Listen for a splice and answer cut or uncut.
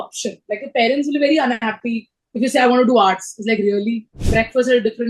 cut